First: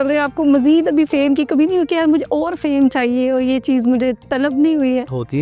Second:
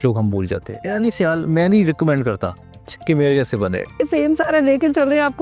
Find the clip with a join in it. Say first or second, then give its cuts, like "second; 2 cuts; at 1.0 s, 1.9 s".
second; 2 cuts; at 0.9 s, 4.0 s